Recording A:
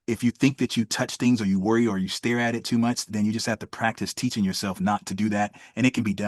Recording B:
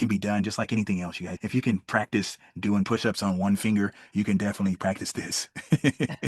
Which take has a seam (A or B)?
B